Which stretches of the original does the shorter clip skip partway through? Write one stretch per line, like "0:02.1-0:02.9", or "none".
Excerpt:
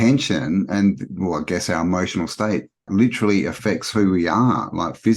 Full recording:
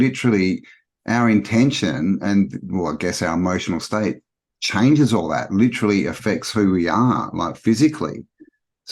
0:04.4-0:05.4

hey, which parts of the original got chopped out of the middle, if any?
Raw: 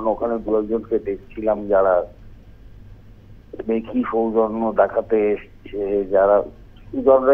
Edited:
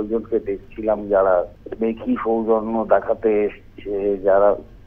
0:02.2-0:03.5

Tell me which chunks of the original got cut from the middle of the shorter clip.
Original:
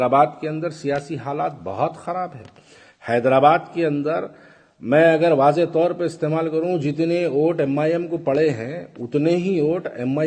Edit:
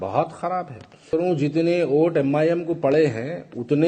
0:02.7-0:06.5

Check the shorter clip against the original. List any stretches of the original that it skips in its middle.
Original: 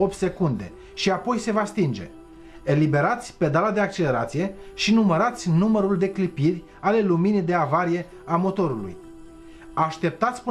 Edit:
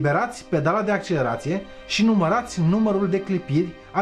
none

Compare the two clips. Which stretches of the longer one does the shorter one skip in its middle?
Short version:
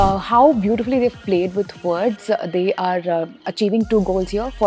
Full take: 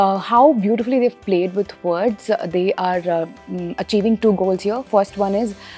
0:03.4-0:03.7

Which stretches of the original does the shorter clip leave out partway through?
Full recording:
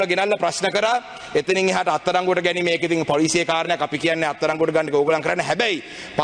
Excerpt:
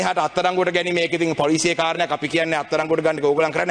none

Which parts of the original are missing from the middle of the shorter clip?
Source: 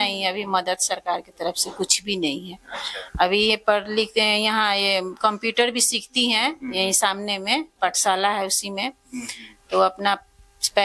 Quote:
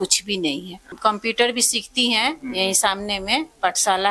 0:02.7-0:05.1

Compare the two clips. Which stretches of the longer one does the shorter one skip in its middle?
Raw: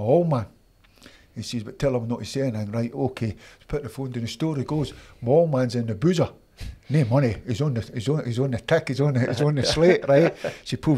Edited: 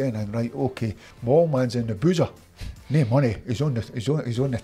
0:03.5-0:05.1

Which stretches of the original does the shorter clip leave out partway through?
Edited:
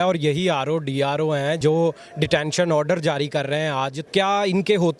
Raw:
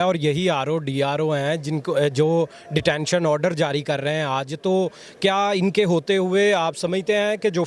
0:01.6-0:02.1
0:04.5-0:05.1

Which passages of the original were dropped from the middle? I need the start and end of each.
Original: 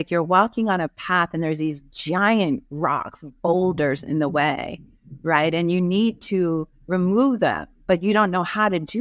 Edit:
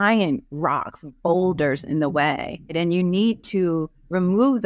0:04.9-0:05.5

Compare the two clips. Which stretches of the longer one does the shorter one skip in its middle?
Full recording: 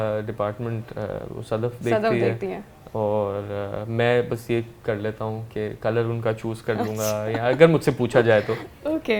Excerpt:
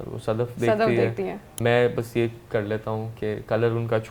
0:02.7-0:03.8

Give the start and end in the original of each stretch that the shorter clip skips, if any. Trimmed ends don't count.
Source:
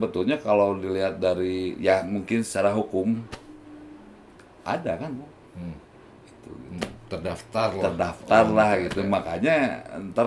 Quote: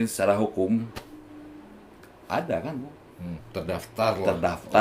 0:05.8-0:07.0

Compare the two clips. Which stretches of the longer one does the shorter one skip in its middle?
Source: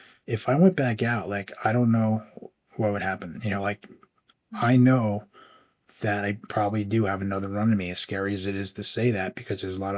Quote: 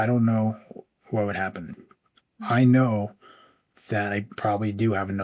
0:03.4-0:03.8

